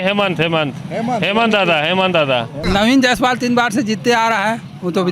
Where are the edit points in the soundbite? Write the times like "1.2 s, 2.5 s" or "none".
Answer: 2.6 s